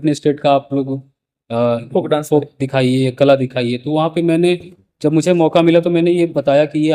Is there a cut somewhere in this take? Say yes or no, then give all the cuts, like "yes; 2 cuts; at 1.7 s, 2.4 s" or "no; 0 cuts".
no; 0 cuts